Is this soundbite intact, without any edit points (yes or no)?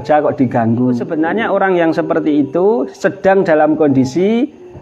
no